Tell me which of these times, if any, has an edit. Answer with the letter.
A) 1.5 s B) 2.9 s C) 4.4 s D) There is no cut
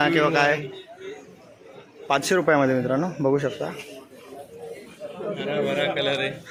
D